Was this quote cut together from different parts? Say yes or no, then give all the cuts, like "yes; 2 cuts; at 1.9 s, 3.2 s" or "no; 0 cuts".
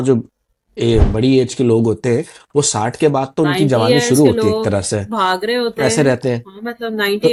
no; 0 cuts